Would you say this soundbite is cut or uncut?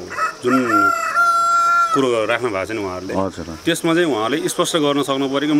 uncut